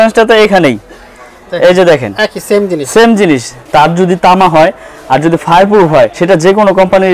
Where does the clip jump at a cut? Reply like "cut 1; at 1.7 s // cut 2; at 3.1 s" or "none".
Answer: cut 1; at 3.5 s // cut 2; at 6.2 s